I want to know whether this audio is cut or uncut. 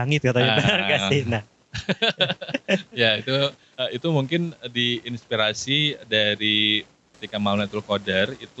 cut